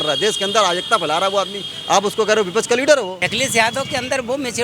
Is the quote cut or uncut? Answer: cut